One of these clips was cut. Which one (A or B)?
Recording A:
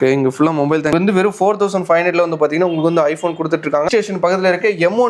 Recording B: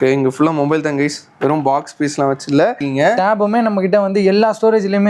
A